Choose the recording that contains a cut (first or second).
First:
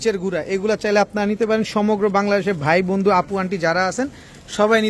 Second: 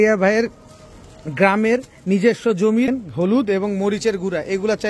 second